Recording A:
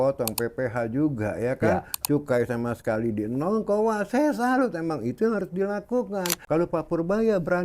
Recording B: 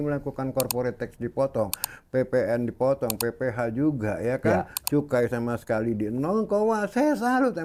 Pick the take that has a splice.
A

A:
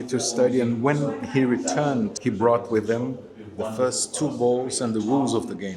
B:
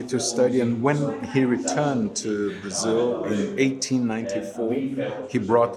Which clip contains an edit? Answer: A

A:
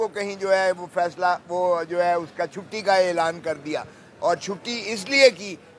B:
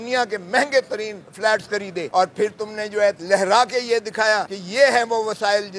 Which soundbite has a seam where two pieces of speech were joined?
B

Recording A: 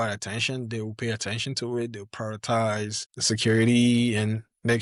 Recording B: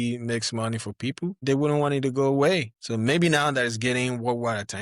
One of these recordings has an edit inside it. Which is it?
B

